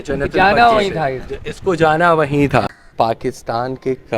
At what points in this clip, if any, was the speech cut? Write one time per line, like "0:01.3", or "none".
0:02.8